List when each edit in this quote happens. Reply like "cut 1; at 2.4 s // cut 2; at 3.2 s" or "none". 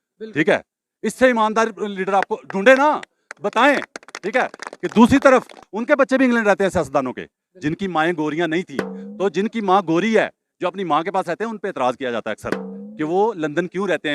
cut 1; at 5.7 s